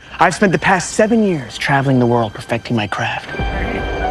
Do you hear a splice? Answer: no; 0 cuts

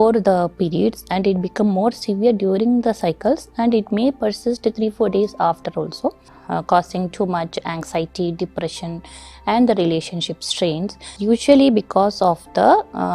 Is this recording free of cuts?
no; 2 cuts; at 6.3 s, 11.1 s

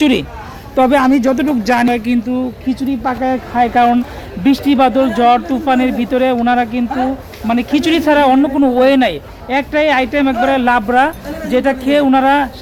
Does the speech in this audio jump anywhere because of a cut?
no; 0 cuts

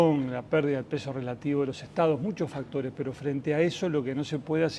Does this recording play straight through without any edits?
no; 1 cut; at 1.4 s

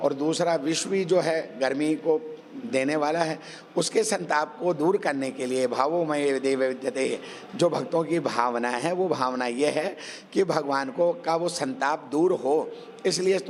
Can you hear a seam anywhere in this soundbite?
no; 0 cuts

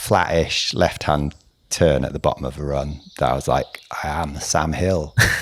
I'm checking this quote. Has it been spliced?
no; 0 cuts

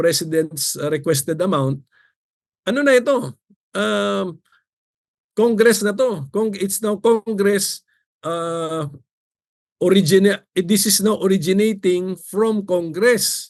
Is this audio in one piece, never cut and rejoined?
yes; 0 cuts

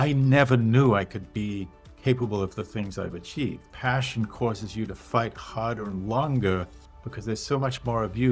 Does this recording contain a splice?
yes; 1 cut; at 3.6 s

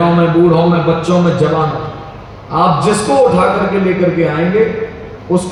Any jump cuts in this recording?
no; 0 cuts

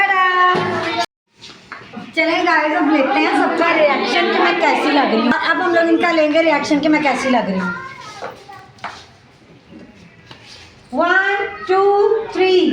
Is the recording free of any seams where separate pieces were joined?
no; 2 cuts; at 1.1 s, 5.3 s

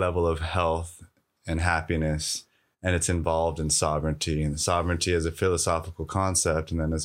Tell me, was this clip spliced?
no; 0 cuts

